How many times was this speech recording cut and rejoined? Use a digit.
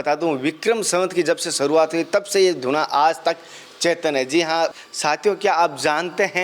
1